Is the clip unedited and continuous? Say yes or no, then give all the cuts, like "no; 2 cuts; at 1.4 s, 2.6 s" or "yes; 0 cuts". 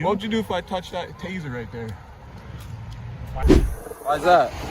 no; 1 cut; at 3.4 s